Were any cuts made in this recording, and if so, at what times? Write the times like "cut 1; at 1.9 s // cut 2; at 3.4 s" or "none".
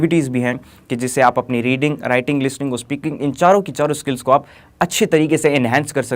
none